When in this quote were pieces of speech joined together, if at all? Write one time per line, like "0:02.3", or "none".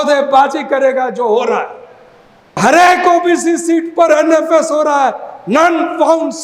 0:02.6